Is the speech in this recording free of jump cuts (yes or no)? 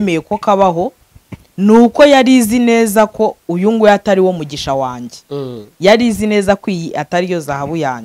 yes